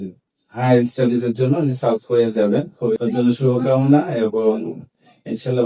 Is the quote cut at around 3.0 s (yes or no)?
yes